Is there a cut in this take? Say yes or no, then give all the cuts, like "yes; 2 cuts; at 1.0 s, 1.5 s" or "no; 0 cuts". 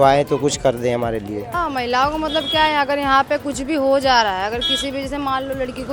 yes; 1 cut; at 1.4 s